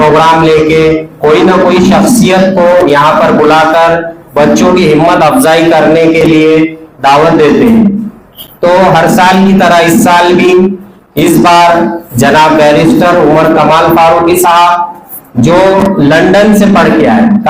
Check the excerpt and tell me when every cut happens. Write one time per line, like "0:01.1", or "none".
none